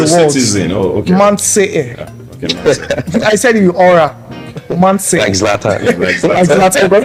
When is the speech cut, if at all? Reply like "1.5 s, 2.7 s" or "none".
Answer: none